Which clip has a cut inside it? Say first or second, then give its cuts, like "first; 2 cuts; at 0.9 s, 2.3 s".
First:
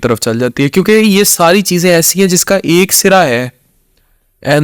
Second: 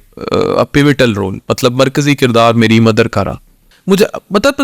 second; 1 cut; at 3.7 s